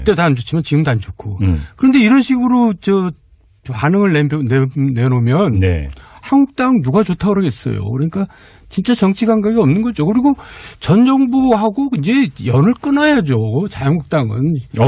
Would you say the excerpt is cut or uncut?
uncut